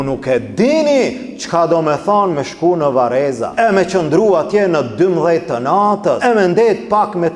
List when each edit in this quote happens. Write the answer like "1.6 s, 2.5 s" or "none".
3.4 s, 6.2 s